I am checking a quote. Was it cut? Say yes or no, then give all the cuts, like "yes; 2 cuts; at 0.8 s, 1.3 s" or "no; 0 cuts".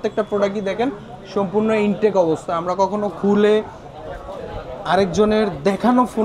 no; 0 cuts